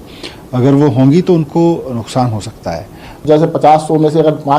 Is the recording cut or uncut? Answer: cut